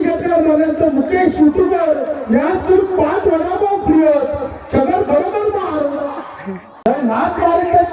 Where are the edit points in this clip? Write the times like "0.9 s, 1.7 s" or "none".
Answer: 6.9 s